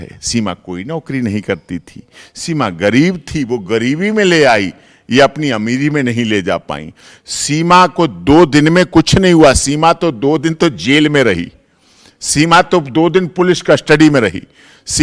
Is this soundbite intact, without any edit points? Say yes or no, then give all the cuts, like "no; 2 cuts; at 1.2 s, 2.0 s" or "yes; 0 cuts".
yes; 0 cuts